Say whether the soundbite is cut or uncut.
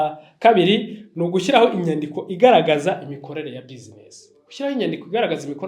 uncut